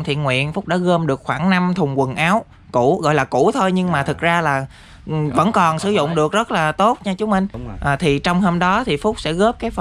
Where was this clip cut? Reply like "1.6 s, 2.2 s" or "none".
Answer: 7.7 s